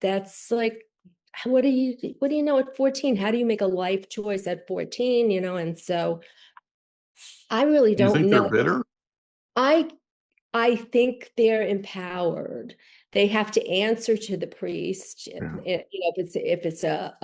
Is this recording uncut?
yes; 0 cuts

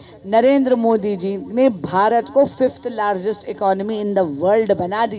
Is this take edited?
no; 0 cuts

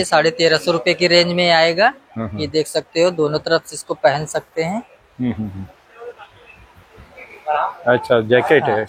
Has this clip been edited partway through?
no; 0 cuts

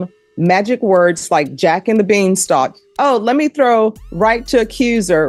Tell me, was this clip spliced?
no; 0 cuts

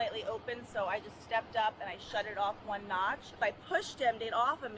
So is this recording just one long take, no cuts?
no; 1 cut; at 3.4 s

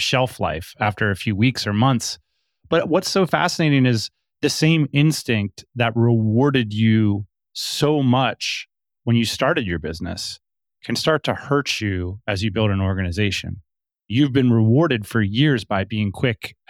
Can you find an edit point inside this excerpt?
yes; 1 cut; at 14.1 s

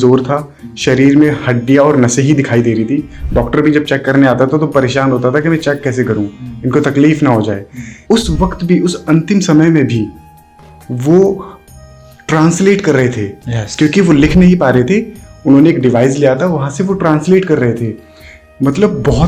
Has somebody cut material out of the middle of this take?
no; 0 cuts

